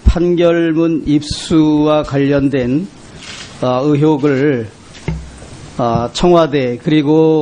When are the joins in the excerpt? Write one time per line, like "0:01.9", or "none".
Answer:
none